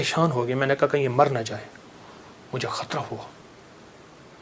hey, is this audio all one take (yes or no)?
yes